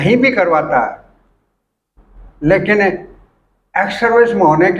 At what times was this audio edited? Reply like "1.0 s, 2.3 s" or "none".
none